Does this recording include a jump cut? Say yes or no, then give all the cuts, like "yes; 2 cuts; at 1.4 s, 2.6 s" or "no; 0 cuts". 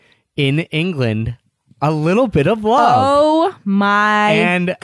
no; 0 cuts